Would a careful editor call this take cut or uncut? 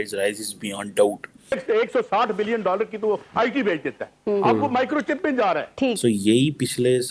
cut